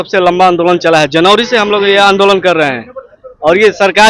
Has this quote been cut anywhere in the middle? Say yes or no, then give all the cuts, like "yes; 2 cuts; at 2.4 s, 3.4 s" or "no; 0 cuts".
no; 0 cuts